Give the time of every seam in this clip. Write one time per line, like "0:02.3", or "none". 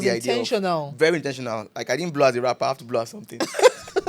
none

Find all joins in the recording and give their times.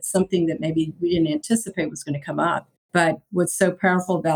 0:02.8

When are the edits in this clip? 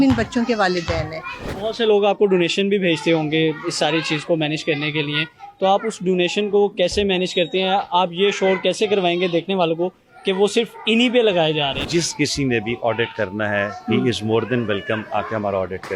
0:01.5
0:11.8

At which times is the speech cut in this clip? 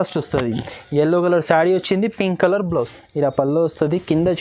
0:02.7

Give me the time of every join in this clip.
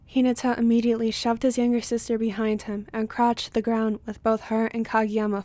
none

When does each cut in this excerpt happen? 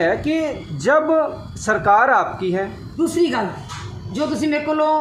0:02.8

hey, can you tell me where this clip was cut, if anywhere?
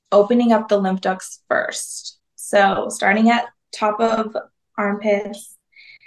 none

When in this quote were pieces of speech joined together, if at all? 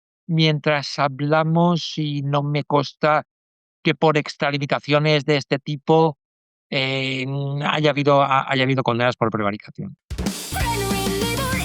0:10.4

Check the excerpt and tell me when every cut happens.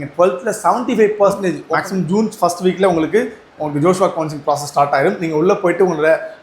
0:01.6

